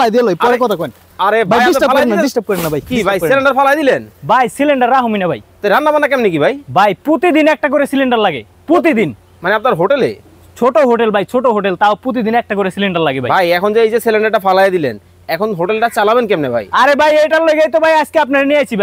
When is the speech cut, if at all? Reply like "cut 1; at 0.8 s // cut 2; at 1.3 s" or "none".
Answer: none